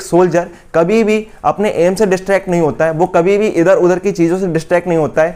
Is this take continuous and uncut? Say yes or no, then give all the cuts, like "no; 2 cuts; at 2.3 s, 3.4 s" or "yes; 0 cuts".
yes; 0 cuts